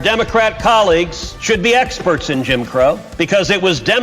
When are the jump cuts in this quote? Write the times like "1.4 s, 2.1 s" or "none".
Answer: 1.3 s, 3.1 s